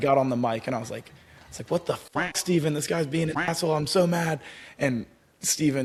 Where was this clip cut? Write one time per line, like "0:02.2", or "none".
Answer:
none